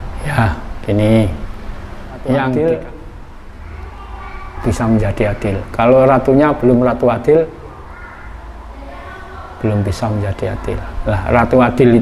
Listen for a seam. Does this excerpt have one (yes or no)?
yes